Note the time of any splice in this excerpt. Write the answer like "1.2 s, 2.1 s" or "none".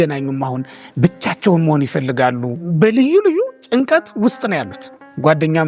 2.6 s